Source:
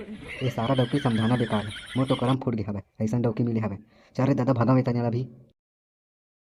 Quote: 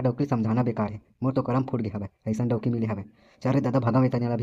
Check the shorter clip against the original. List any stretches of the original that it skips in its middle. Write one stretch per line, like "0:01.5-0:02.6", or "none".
none